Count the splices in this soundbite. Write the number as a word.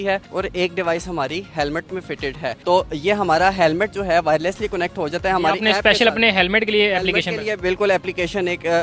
zero